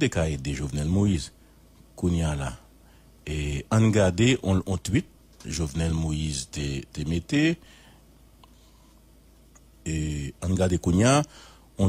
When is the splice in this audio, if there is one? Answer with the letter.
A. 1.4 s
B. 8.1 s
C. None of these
B